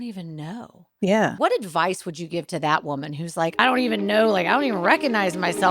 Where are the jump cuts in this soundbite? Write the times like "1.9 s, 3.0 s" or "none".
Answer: 1.3 s, 3.6 s